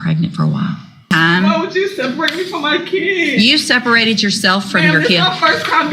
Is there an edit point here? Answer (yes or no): yes